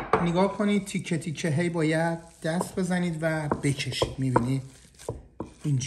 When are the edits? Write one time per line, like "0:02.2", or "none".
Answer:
none